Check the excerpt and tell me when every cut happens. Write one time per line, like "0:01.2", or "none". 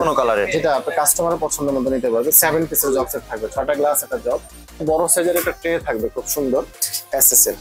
0:04.8

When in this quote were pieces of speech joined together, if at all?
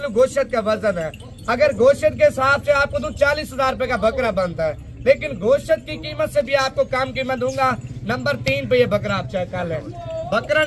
none

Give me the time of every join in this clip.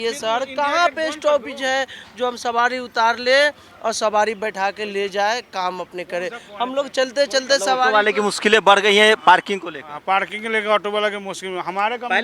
none

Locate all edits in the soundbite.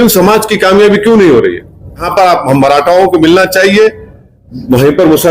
0:02.1

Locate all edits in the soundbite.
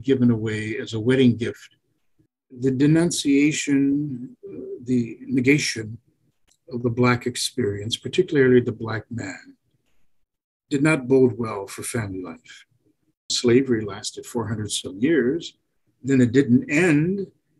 0:02.5
0:13.3

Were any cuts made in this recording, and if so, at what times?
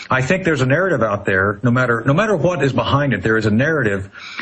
none

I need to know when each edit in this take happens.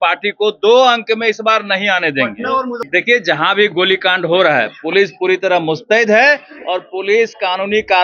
0:02.9

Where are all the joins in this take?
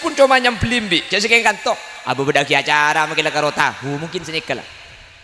none

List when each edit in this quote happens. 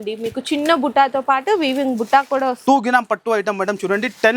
0:02.6

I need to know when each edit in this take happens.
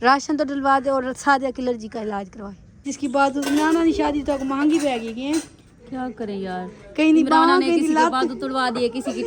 0:02.8

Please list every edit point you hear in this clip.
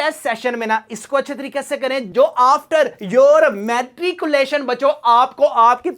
0:02.1

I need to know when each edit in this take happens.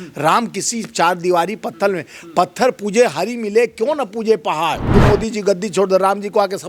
0:04.8

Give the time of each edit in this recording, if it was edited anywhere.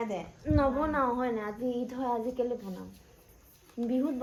none

